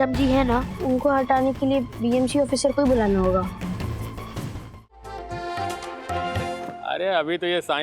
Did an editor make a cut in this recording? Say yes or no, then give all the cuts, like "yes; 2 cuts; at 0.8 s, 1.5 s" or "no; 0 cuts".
yes; 1 cut; at 5.0 s